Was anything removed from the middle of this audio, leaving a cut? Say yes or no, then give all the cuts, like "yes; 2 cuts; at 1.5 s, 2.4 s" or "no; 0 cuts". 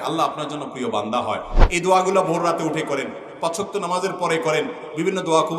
yes; 1 cut; at 1.5 s